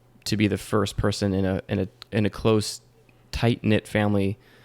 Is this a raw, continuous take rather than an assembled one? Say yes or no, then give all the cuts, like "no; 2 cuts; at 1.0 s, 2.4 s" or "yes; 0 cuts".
no; 1 cut; at 2.0 s